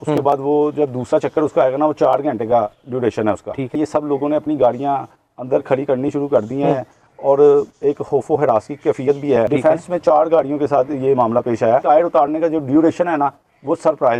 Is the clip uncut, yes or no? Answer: no